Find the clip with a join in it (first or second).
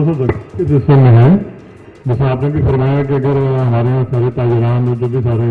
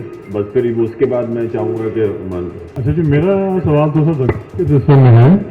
second